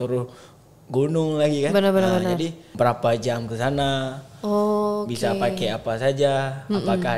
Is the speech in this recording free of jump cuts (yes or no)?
no